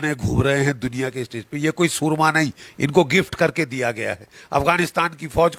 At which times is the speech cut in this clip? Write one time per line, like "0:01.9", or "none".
none